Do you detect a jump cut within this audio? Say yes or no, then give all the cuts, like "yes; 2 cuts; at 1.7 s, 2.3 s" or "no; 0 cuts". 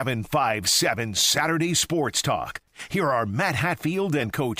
no; 0 cuts